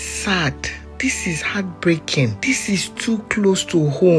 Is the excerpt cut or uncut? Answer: cut